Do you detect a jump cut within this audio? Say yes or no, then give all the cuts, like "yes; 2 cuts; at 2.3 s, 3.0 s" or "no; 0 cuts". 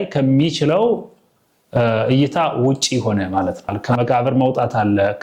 yes; 1 cut; at 3.8 s